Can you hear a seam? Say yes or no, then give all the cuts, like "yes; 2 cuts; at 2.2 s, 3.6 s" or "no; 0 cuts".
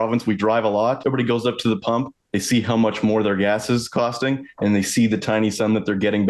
yes; 1 cut; at 1.0 s